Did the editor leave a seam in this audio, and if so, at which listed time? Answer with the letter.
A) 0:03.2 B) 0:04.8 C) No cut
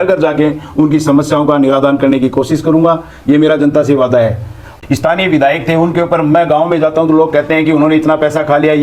B